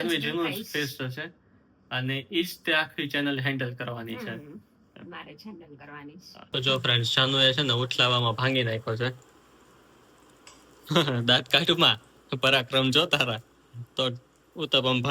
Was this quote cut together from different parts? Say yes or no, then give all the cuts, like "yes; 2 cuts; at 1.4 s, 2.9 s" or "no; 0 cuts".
yes; 1 cut; at 6.4 s